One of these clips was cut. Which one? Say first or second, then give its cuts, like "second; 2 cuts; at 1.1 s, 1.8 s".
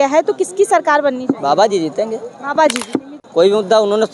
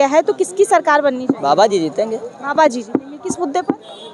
first; 1 cut; at 3.2 s